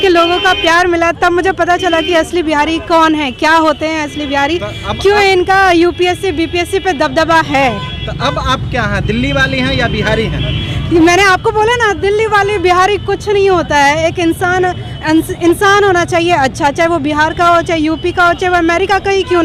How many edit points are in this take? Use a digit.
0